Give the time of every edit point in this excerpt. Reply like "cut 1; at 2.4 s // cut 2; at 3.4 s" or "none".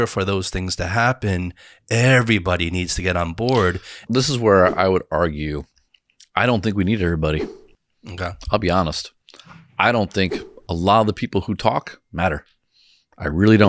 cut 1; at 4.1 s